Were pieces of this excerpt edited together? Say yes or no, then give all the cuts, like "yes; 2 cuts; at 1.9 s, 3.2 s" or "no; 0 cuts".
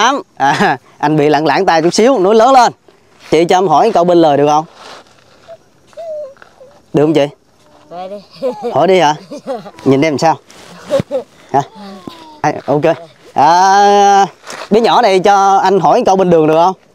yes; 2 cuts; at 3.3 s, 12.4 s